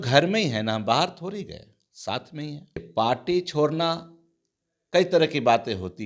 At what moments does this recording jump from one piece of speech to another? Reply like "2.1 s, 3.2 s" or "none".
2.9 s

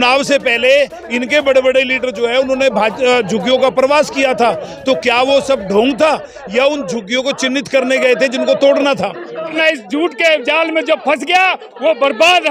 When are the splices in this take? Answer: 9.5 s

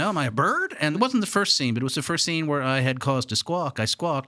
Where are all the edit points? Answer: 0.9 s, 2.2 s

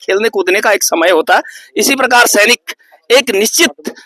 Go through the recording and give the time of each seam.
none

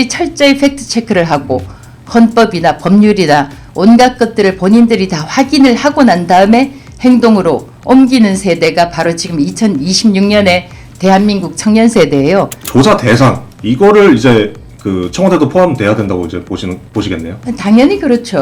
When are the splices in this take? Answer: 12.6 s

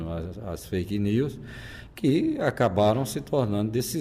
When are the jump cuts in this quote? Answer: none

